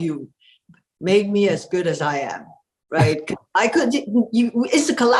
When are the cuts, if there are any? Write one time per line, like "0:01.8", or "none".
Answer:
none